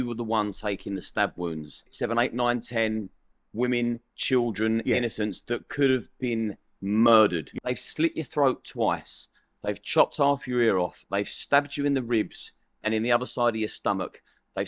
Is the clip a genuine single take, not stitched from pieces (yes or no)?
no